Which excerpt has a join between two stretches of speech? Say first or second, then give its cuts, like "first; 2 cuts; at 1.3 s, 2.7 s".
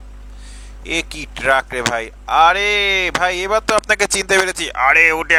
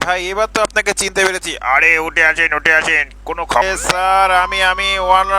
second; 1 cut; at 3.6 s